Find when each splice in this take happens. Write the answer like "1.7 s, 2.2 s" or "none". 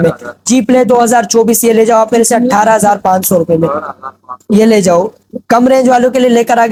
none